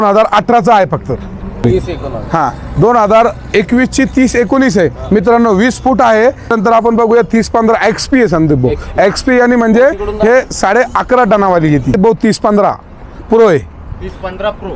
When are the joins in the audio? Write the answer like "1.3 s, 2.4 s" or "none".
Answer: 1.6 s, 6.5 s, 11.9 s